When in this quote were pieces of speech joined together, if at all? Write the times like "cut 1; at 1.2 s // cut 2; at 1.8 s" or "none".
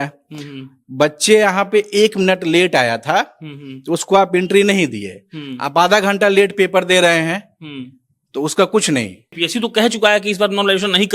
cut 1; at 9.3 s